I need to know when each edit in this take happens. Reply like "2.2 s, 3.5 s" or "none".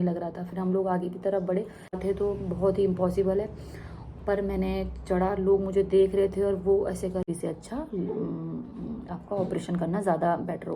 2.0 s, 7.2 s

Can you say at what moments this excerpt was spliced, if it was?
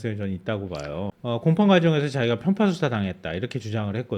1.0 s

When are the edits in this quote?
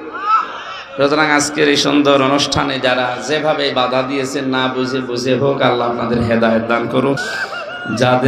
7.2 s

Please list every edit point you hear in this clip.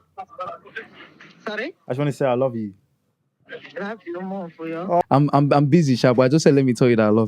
5.0 s

